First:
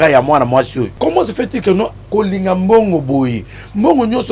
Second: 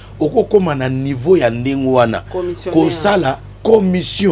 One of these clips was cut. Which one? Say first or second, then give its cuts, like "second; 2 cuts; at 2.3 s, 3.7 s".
first; 1 cut; at 0.9 s